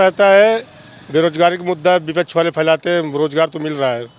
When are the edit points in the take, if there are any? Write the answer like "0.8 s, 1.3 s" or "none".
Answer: none